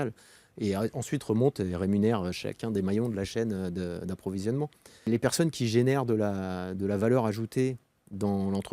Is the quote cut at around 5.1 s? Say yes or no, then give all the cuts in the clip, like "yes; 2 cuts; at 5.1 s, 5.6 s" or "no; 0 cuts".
yes; 1 cut; at 5.1 s